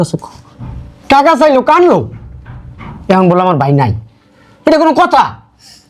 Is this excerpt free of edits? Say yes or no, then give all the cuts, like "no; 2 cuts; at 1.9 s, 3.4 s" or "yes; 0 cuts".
yes; 0 cuts